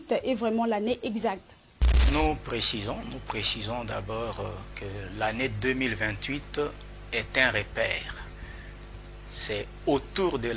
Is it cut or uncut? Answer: uncut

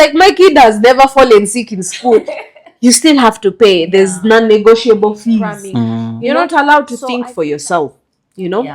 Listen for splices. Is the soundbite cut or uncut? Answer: cut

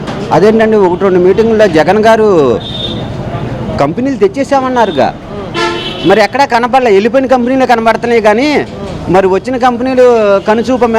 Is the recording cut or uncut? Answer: uncut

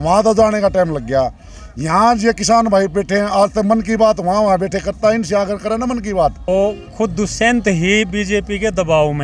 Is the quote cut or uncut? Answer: cut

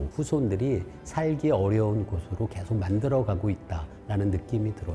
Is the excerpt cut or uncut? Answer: uncut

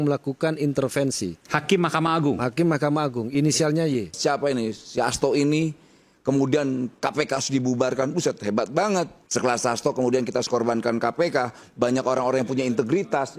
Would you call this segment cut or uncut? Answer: cut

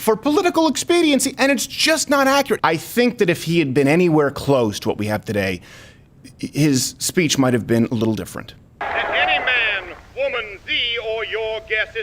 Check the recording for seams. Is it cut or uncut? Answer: cut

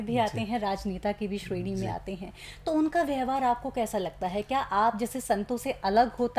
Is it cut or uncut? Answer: uncut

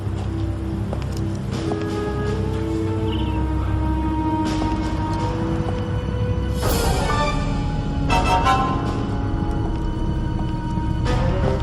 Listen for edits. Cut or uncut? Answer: uncut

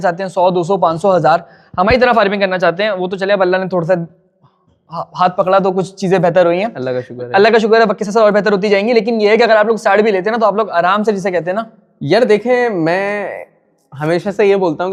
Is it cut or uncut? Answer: uncut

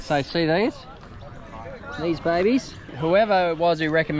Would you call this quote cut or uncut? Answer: cut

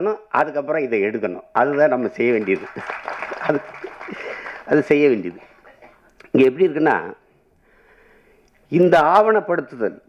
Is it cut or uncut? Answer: uncut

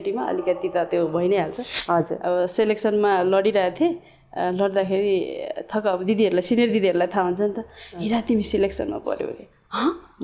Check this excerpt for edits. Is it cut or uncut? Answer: cut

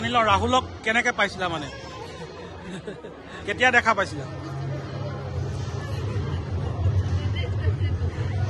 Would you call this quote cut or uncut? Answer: cut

